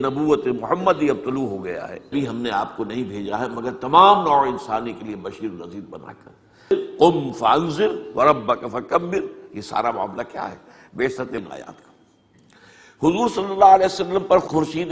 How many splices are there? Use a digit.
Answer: 3